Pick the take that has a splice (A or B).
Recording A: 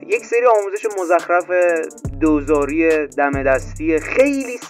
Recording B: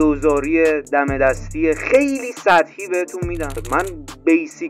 B